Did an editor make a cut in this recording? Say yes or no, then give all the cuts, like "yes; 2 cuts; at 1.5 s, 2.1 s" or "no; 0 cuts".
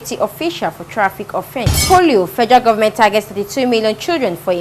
yes; 1 cut; at 1.8 s